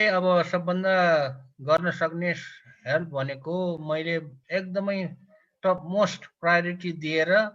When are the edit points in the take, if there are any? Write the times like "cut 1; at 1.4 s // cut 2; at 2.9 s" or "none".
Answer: none